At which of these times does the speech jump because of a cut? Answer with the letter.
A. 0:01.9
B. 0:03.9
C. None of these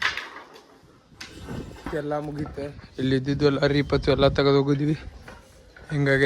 A